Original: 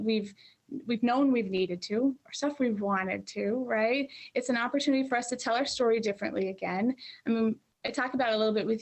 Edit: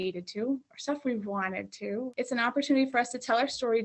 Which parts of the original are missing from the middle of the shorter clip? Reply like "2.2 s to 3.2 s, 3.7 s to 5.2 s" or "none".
3.6 s to 4.3 s